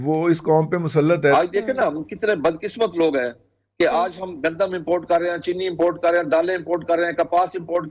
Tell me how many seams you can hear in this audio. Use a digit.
1